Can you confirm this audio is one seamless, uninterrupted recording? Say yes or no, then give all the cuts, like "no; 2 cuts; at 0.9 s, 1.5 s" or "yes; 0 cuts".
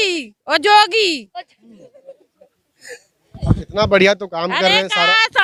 yes; 0 cuts